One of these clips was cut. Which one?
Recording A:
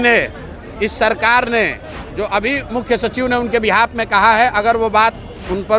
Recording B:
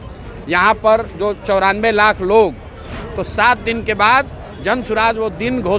B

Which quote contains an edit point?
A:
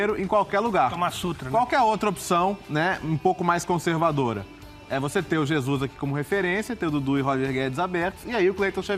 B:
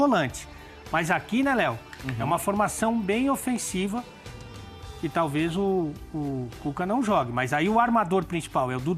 A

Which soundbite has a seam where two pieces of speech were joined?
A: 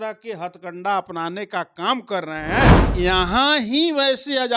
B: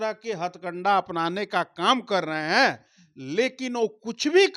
A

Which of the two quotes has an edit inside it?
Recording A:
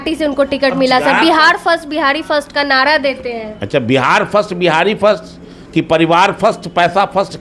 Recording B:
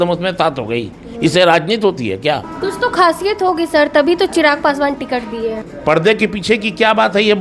B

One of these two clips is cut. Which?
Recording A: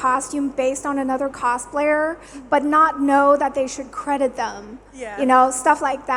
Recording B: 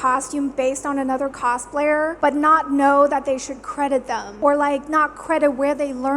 B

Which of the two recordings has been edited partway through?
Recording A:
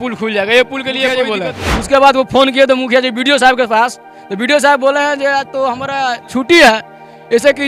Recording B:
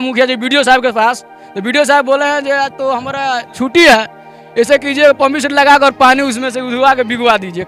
A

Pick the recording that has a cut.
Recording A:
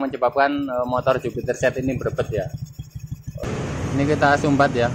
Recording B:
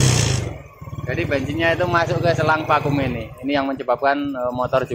A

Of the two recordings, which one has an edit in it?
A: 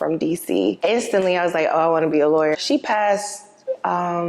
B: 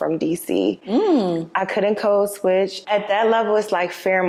A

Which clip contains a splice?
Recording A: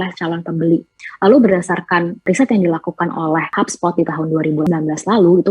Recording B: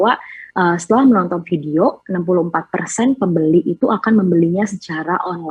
A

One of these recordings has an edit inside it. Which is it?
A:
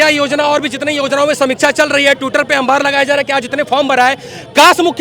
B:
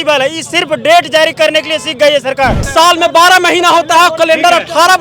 B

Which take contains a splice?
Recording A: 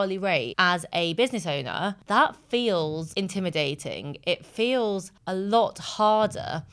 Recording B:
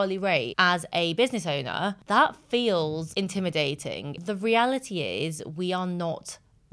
B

